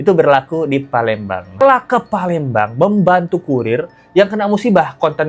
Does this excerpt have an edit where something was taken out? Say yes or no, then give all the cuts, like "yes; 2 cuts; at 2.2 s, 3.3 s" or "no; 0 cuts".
yes; 1 cut; at 1.6 s